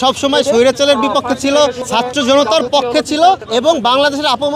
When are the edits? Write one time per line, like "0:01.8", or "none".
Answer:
0:01.8
0:03.4